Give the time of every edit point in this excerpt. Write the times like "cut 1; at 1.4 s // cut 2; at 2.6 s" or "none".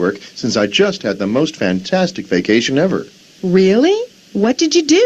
none